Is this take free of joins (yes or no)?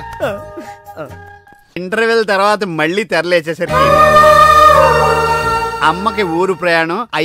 no